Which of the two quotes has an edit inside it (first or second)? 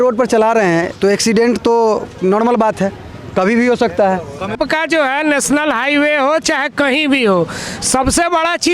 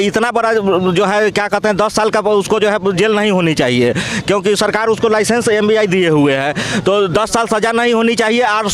first